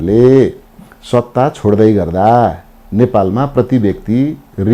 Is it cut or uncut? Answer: uncut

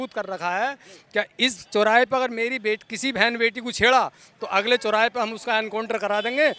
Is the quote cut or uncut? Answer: uncut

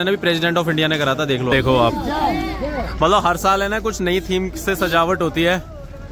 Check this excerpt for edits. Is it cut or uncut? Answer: cut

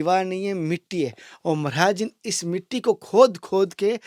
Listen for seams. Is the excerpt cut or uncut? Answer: uncut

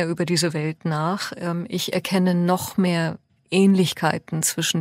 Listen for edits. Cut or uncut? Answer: uncut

